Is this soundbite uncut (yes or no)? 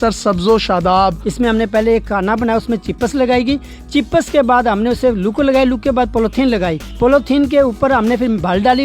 no